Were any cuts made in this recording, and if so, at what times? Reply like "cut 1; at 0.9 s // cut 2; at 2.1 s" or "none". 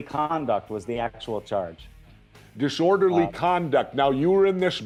none